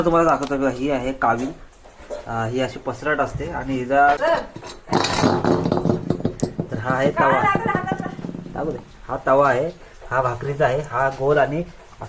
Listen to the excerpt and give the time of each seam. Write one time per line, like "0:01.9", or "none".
0:04.2